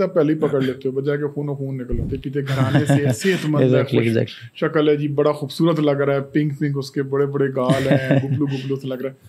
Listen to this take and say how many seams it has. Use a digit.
1